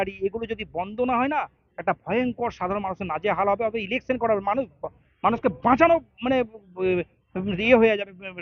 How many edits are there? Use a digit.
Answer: 0